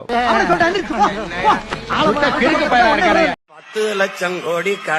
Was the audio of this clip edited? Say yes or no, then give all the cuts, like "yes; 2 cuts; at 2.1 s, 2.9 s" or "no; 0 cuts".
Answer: yes; 1 cut; at 3.4 s